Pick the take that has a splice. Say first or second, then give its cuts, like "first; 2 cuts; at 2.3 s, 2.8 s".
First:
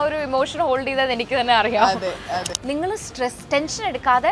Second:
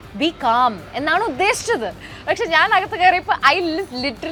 first; 1 cut; at 2.5 s